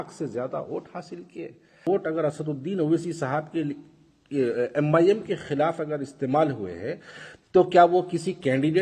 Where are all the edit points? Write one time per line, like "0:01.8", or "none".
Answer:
0:01.8